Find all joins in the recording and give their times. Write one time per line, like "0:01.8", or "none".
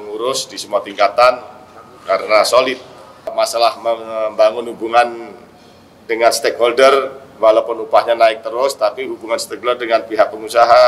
0:03.3